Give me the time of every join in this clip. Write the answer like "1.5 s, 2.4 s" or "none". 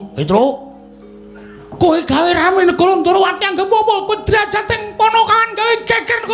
none